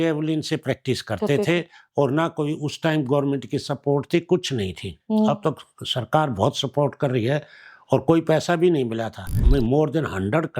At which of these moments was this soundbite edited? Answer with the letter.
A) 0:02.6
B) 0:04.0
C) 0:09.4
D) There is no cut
C